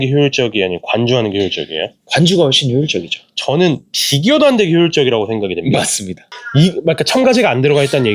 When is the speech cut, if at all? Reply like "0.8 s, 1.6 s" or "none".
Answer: 6.3 s